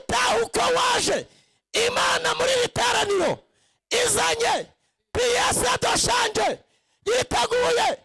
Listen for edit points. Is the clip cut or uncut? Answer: uncut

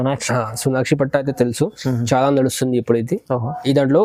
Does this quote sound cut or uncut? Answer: uncut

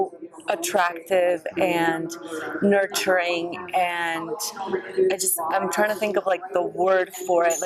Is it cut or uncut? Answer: uncut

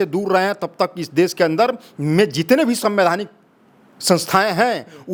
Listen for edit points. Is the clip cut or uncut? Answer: uncut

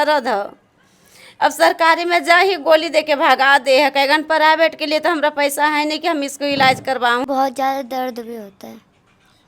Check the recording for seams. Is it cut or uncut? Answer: cut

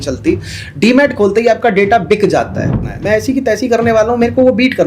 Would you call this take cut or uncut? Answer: cut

